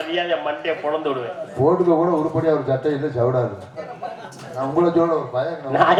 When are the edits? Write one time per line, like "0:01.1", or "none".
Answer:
none